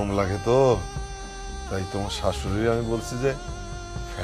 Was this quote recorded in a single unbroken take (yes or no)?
yes